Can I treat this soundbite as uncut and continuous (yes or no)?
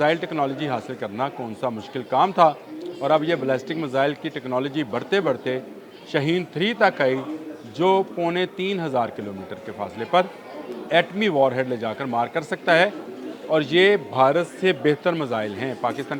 yes